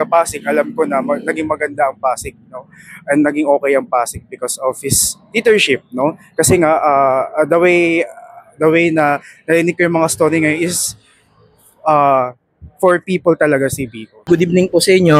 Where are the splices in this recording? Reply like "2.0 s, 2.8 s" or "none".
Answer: none